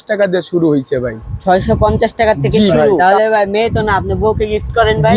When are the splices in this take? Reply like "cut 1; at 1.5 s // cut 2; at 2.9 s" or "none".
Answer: cut 1; at 3.0 s